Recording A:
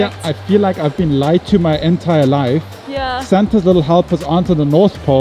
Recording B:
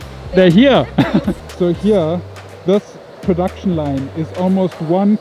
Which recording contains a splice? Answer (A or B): B